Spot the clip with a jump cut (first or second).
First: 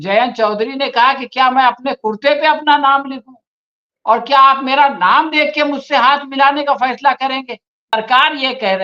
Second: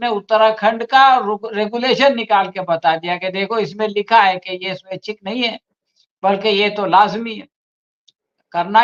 first